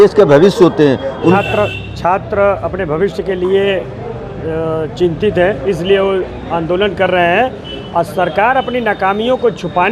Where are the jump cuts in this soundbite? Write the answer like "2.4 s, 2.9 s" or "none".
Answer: 1.4 s